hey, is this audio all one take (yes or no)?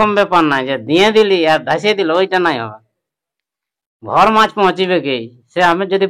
yes